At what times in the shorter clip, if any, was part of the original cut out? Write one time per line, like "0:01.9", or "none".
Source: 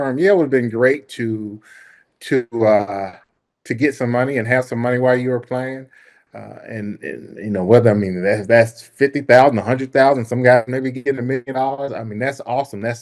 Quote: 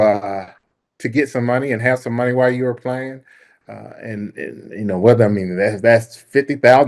none